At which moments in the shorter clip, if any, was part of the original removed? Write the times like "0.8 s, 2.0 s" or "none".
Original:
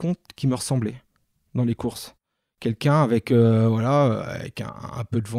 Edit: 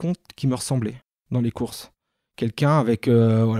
1.1 s